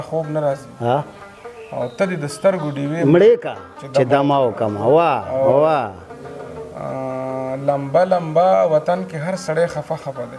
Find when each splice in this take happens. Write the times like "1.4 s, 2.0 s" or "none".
none